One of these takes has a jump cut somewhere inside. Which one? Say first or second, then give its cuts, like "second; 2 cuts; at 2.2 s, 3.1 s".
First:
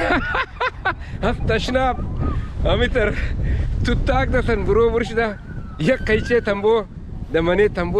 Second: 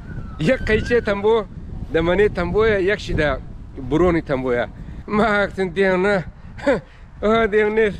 second; 1 cut; at 5.0 s